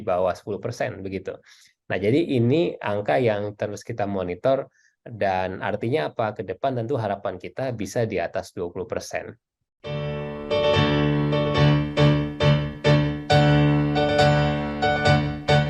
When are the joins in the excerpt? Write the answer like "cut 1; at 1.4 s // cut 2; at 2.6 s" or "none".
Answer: cut 1; at 9.5 s